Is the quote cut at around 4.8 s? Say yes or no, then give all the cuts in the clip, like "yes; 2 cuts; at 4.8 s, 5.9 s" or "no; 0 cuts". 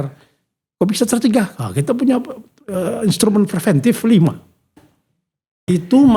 yes; 1 cut; at 4.8 s